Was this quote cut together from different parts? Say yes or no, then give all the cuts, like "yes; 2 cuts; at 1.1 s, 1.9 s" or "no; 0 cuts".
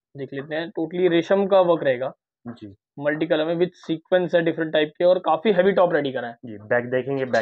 no; 0 cuts